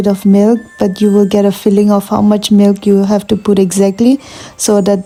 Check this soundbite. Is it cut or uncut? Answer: uncut